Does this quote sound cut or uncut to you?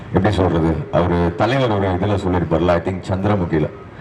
uncut